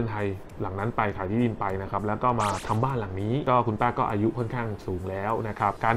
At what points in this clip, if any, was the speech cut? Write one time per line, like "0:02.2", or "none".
0:03.4